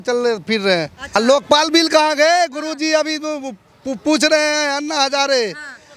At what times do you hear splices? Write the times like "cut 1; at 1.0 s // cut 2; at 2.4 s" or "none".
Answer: cut 1; at 1.2 s